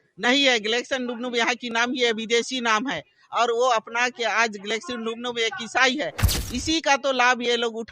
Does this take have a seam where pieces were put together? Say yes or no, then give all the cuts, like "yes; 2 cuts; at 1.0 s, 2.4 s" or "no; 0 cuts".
yes; 1 cut; at 6.2 s